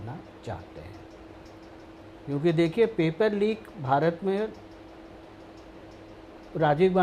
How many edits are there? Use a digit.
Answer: 0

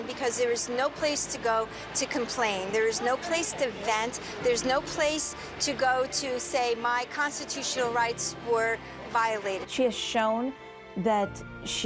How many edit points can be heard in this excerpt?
1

